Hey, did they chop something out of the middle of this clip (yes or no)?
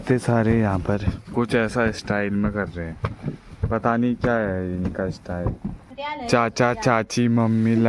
yes